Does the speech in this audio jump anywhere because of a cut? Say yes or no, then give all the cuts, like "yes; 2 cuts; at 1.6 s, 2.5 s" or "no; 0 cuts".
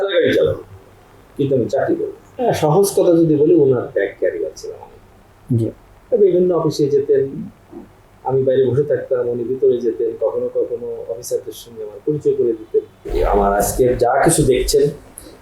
yes; 2 cuts; at 2.2 s, 13.1 s